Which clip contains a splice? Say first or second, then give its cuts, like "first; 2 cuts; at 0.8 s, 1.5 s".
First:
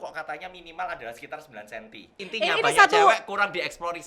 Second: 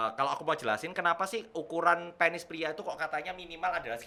first; 1 cut; at 2.2 s